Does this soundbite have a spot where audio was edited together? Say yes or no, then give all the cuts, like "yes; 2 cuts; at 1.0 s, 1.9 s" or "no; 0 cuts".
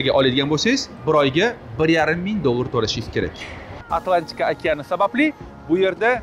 yes; 1 cut; at 3.7 s